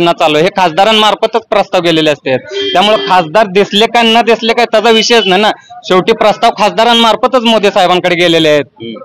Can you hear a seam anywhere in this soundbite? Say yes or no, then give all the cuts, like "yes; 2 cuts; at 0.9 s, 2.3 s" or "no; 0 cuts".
no; 0 cuts